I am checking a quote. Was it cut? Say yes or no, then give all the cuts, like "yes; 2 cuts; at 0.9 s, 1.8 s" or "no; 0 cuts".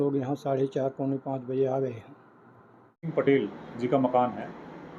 yes; 1 cut; at 3.1 s